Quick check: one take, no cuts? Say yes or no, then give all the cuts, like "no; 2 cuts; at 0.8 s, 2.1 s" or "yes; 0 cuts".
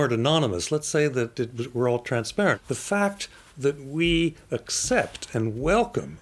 no; 1 cut; at 2.6 s